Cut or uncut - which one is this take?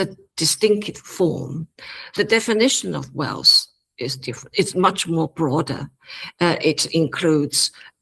cut